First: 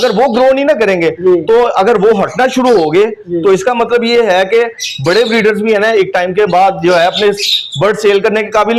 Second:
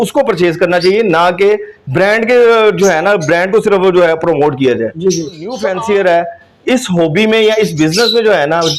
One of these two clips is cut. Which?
second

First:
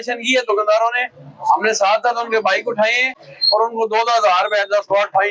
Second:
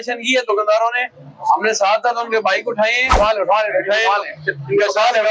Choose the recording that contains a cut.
second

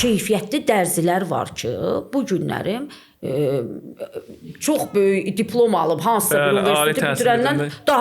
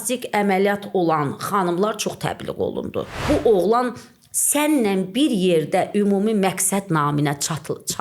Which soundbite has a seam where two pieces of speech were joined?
second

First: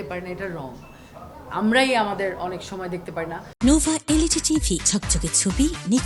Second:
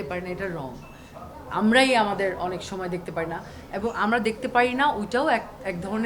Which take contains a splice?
second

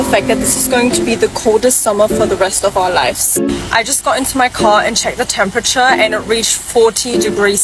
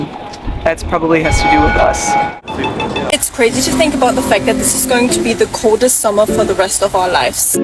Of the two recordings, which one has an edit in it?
second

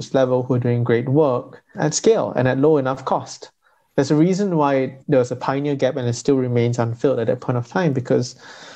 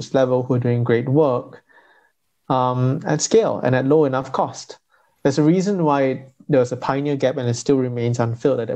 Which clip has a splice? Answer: first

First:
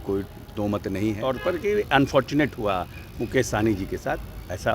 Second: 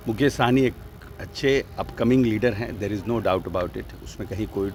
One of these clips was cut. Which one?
first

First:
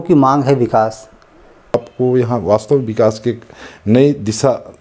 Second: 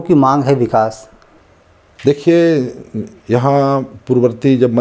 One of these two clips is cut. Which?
first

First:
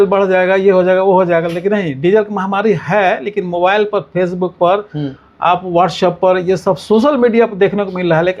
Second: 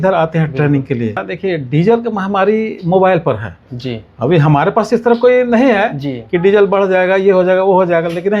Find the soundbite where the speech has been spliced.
second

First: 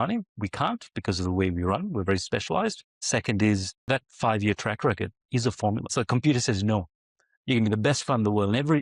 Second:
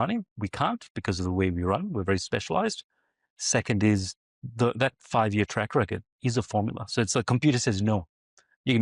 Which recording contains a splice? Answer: first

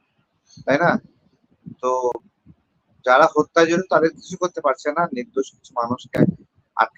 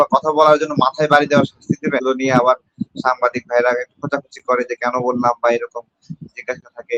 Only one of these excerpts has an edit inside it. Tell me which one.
second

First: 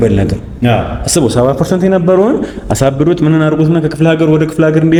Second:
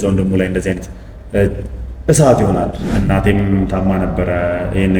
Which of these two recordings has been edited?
second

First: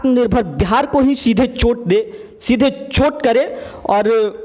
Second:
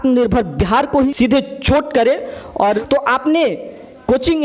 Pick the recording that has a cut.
second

